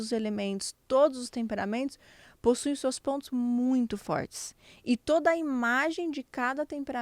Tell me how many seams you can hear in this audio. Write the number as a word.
zero